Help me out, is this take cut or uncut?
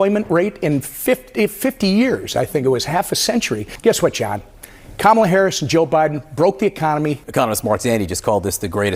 cut